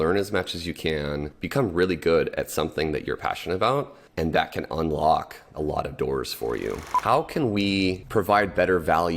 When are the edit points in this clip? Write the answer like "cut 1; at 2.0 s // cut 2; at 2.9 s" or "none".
cut 1; at 1.3 s // cut 2; at 4.0 s // cut 3; at 5.5 s // cut 4; at 6.9 s // cut 5; at 8.0 s